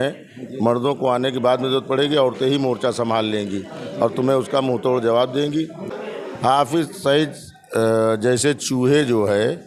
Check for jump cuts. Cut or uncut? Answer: cut